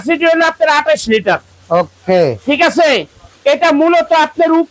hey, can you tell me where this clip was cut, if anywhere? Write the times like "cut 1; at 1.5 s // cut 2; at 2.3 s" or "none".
none